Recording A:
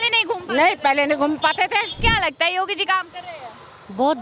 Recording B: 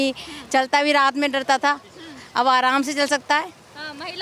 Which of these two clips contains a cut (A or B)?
A